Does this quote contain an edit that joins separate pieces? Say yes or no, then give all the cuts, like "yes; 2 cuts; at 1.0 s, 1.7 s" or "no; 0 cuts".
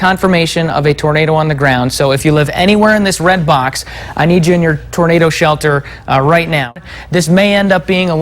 yes; 1 cut; at 6.8 s